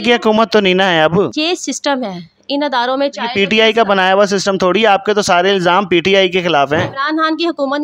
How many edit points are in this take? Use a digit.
1